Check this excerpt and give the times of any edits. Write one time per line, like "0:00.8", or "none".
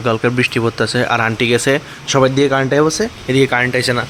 none